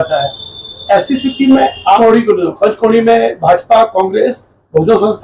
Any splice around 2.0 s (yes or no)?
yes